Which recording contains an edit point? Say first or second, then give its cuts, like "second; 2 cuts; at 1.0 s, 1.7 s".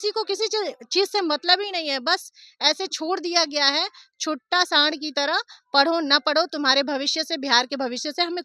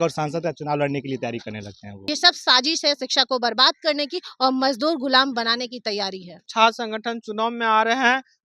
second; 2 cuts; at 1.9 s, 6.5 s